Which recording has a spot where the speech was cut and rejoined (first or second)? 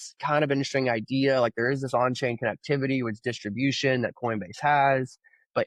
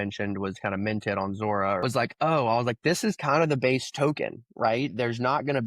second